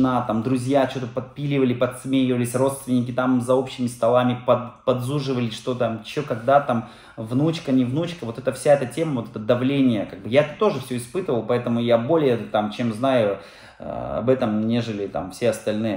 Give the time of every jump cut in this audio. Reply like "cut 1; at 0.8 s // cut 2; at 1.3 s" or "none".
none